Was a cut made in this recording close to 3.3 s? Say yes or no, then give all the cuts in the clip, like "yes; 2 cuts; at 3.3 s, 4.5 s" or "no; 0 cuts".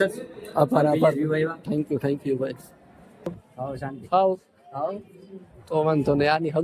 yes; 1 cut; at 3.3 s